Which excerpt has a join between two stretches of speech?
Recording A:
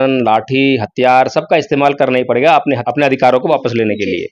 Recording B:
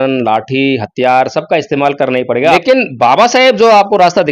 B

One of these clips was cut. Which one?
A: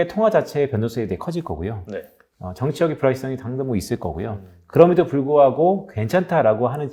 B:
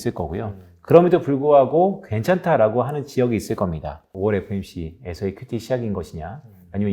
B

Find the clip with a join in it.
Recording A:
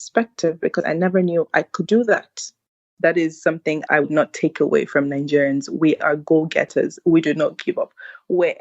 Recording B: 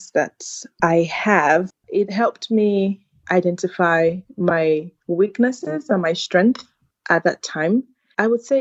A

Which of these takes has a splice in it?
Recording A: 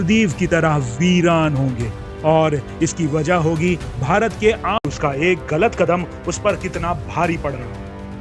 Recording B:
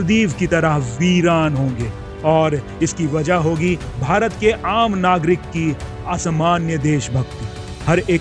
A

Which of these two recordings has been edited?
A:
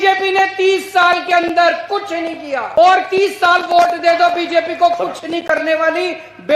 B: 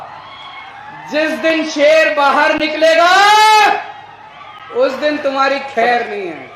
A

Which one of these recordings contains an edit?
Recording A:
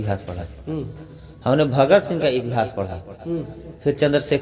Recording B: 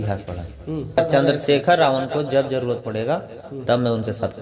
B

